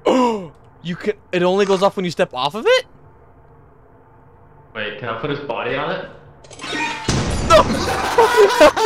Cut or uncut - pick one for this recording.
cut